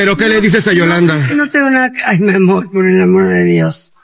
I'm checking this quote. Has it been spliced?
no; 0 cuts

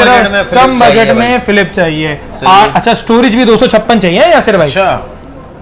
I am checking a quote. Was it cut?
no; 0 cuts

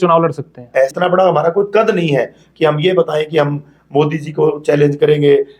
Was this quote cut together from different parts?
yes; 1 cut; at 0.9 s

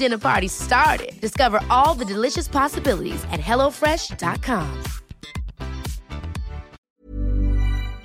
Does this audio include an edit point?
yes; 1 cut; at 6.7 s

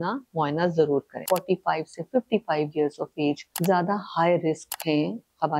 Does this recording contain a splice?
yes; 3 cuts; at 1.2 s, 3.5 s, 4.7 s

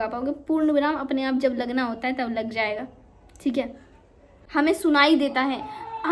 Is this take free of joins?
no; 1 cut; at 4.4 s

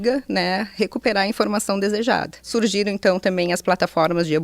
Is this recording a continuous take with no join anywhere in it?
no; 1 cut; at 2.5 s

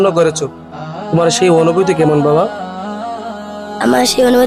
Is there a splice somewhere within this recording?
no; 0 cuts

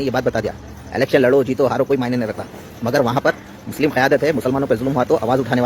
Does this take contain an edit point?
no; 0 cuts

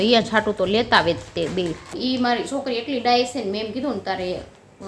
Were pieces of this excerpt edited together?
yes; 1 cut; at 2.0 s

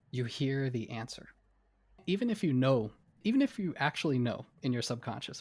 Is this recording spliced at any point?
yes; 2 cuts; at 2.0 s, 3.0 s

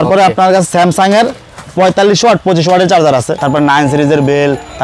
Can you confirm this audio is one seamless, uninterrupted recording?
no; 1 cut; at 3.3 s

